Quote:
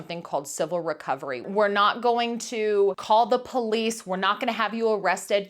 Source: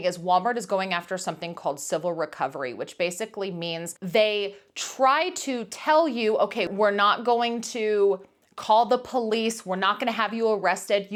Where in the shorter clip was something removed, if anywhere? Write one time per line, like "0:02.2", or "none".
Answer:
0:01.5
0:03.0